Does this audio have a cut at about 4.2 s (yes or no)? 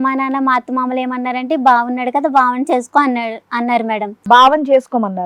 yes